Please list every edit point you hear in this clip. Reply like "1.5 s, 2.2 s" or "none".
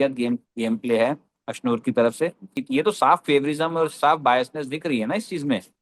2.6 s